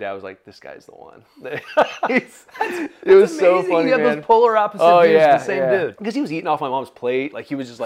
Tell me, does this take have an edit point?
yes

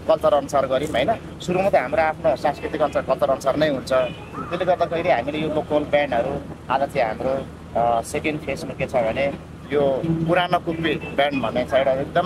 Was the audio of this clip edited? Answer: no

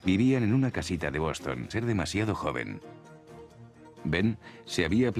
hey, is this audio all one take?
yes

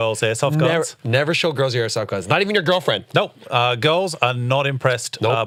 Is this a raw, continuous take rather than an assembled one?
yes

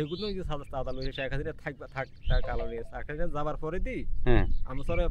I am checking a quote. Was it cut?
no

